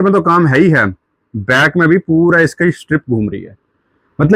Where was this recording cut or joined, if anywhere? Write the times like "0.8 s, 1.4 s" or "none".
none